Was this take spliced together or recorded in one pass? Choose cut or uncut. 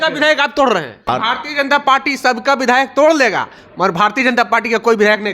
cut